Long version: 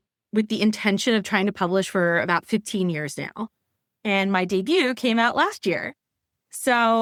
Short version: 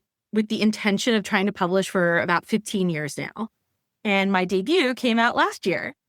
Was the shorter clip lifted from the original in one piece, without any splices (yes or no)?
yes